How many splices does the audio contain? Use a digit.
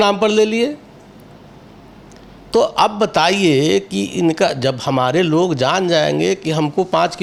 0